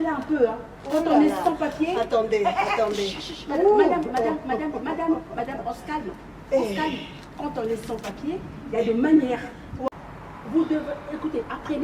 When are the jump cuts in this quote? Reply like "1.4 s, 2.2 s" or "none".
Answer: 9.9 s